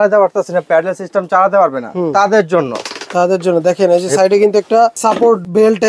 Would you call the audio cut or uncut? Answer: uncut